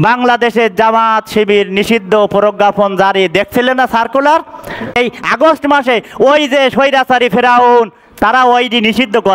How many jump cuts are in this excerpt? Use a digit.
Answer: 1